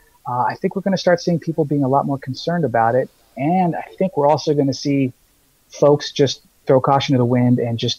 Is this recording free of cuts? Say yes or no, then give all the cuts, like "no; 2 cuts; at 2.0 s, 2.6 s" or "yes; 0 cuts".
yes; 0 cuts